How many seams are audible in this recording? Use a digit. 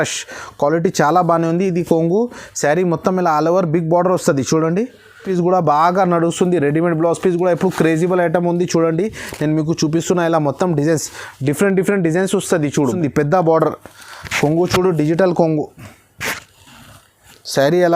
2